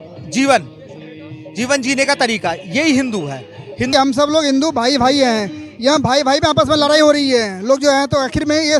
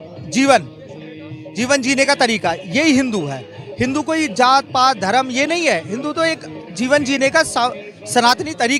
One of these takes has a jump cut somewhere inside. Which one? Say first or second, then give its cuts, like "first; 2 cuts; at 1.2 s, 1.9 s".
first; 1 cut; at 3.9 s